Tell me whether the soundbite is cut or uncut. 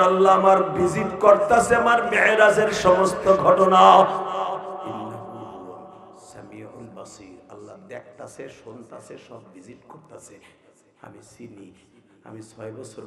uncut